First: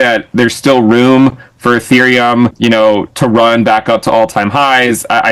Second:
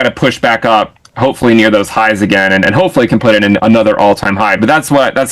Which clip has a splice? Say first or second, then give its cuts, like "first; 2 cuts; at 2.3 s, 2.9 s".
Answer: first; 1 cut; at 2.6 s